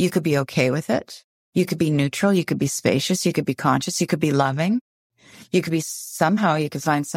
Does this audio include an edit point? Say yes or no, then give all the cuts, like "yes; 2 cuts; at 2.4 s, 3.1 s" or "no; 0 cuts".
no; 0 cuts